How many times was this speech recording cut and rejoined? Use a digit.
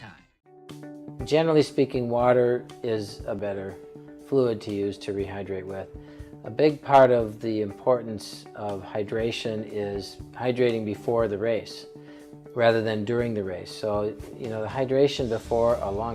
0